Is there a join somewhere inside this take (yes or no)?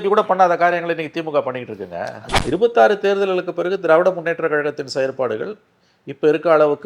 yes